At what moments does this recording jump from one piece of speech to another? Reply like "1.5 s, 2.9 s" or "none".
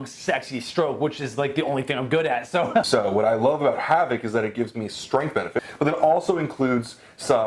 2.9 s, 5.7 s